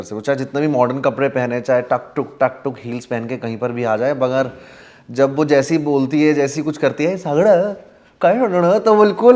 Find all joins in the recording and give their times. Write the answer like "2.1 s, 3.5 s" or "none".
none